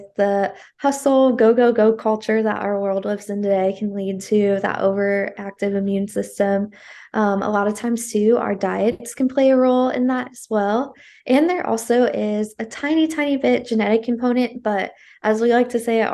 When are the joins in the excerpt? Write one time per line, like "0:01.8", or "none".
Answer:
none